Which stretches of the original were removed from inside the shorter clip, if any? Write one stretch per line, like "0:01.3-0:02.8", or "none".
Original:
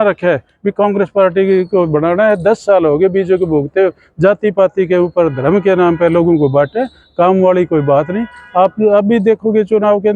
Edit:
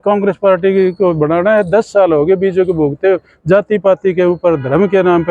none